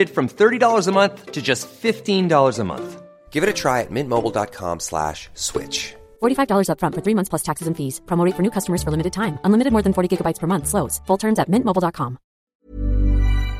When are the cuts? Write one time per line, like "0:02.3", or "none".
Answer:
0:12.3